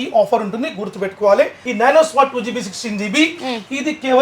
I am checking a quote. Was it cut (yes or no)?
yes